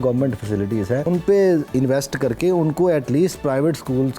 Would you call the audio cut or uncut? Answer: cut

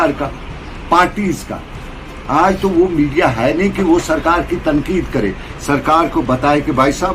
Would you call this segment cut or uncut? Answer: uncut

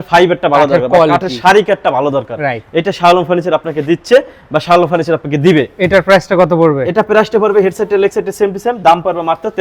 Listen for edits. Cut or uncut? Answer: uncut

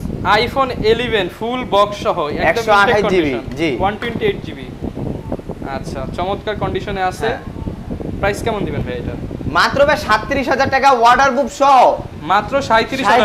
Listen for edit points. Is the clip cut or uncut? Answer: uncut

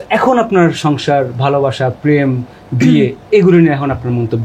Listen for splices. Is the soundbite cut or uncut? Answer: uncut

